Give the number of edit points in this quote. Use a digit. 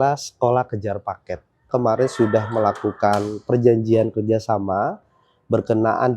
1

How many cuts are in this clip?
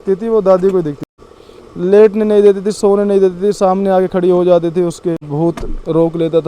2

